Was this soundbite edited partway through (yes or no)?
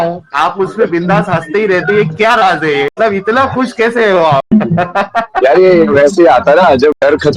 no